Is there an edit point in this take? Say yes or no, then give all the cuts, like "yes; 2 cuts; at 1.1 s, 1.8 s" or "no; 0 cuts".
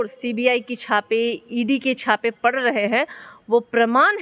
no; 0 cuts